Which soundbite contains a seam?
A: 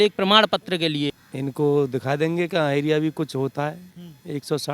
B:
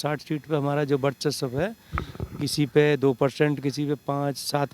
A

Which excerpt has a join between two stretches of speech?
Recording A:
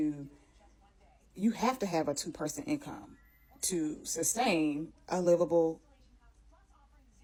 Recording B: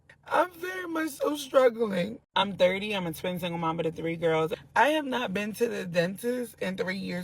B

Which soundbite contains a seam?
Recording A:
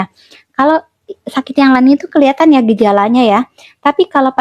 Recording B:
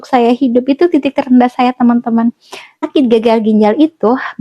B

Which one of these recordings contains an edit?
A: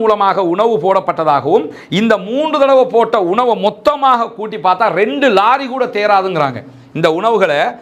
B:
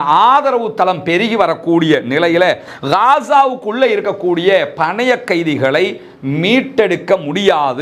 B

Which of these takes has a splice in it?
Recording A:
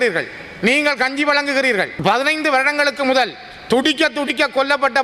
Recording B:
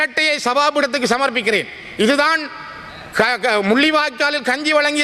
A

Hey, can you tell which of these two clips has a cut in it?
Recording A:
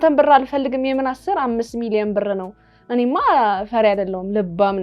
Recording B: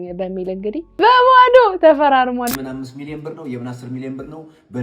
B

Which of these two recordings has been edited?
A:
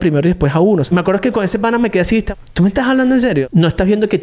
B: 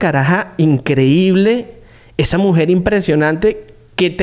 A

